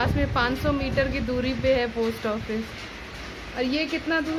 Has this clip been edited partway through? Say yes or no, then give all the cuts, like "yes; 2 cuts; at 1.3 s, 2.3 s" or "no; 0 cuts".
no; 0 cuts